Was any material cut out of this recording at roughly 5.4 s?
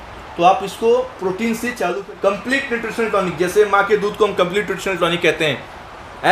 no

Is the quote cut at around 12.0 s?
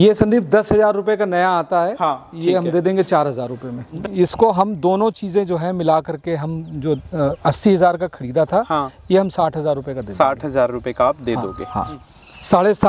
yes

